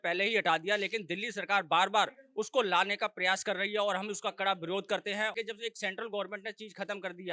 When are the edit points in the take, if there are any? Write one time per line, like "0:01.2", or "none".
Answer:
0:05.3